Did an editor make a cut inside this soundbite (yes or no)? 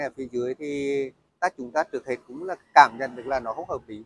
no